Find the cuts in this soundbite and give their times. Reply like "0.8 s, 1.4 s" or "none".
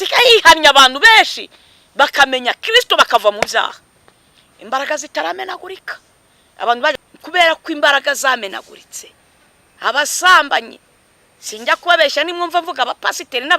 6.9 s